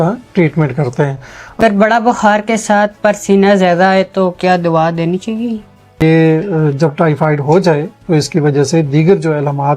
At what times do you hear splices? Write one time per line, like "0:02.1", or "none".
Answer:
0:01.6
0:06.0